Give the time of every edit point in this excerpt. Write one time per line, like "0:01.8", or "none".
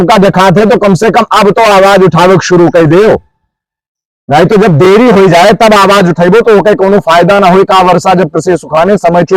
none